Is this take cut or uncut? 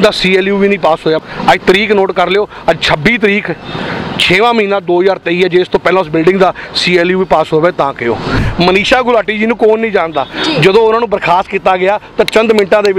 cut